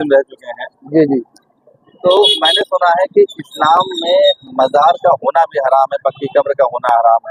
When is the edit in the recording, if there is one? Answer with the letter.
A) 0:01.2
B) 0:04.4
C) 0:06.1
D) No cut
D